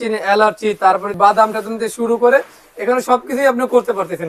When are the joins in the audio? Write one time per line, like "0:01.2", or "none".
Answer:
none